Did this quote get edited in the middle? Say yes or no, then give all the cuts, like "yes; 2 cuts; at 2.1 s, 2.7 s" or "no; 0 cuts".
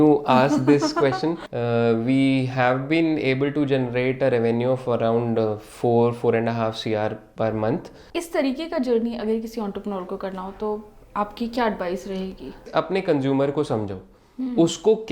yes; 3 cuts; at 1.5 s, 8.0 s, 12.7 s